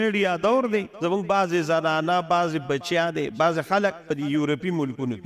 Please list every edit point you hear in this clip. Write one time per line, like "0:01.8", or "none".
0:00.9
0:04.0

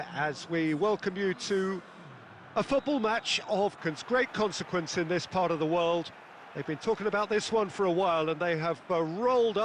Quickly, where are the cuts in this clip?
0:03.9

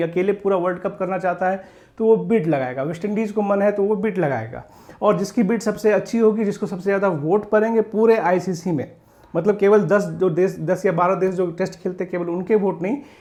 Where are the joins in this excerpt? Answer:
none

